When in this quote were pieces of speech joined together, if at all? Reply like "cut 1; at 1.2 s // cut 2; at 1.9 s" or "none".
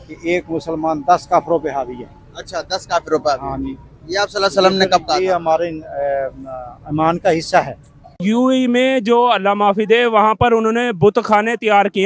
cut 1; at 8.2 s